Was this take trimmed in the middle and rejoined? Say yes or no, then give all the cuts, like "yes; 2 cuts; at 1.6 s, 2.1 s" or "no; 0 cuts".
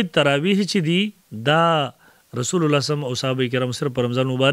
yes; 1 cut; at 1.3 s